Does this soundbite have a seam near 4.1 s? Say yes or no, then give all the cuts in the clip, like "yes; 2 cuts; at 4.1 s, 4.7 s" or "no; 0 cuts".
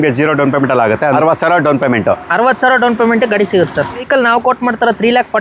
yes; 2 cuts; at 1.1 s, 4.1 s